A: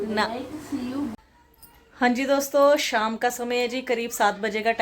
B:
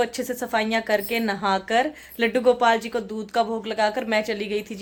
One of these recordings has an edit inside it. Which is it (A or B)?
A